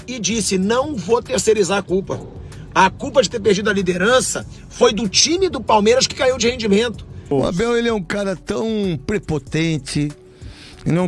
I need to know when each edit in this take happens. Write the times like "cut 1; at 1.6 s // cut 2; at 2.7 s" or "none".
cut 1; at 7.3 s